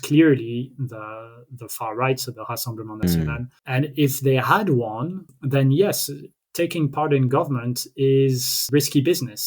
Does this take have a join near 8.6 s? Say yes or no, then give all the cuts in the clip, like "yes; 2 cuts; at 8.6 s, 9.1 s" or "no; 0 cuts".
yes; 3 cuts; at 3.5 s, 5.3 s, 8.6 s